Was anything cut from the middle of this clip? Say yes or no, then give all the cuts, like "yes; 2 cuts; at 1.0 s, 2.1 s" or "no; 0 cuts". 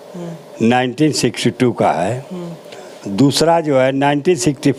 no; 0 cuts